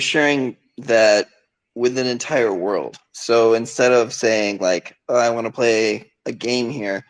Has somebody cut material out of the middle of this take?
no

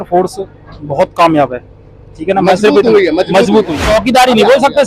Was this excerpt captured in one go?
no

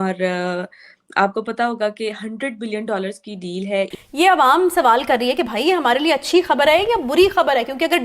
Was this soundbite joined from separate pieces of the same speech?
yes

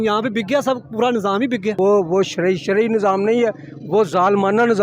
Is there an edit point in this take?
yes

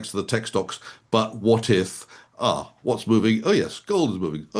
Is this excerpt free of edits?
yes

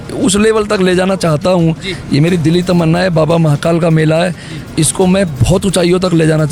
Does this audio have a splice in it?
no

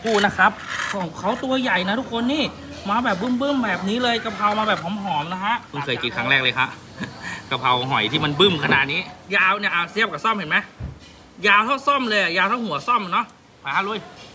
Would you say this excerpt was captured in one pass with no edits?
no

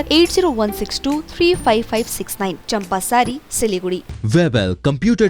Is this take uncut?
no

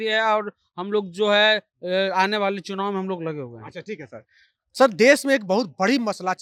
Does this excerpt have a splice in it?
no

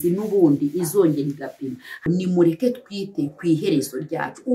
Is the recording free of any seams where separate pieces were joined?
no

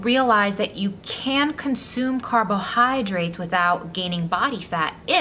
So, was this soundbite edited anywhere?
no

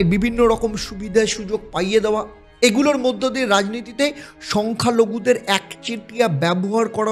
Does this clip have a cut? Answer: no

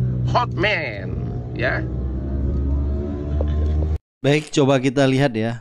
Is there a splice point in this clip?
no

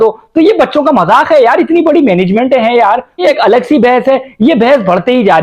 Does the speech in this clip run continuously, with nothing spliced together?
no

